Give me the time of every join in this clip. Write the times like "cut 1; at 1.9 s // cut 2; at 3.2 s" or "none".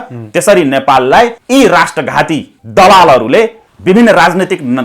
cut 1; at 1.4 s // cut 2; at 2.6 s // cut 3; at 3.7 s